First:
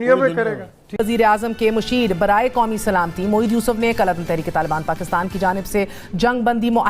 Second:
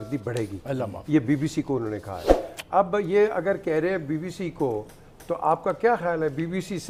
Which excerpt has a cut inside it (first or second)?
first